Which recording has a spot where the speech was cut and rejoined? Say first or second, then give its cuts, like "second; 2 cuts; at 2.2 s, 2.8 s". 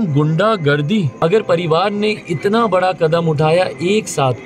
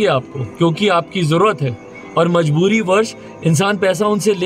first; 1 cut; at 1.1 s